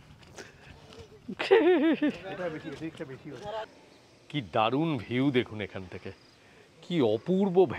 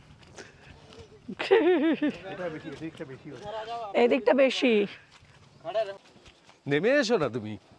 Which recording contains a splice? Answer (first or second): first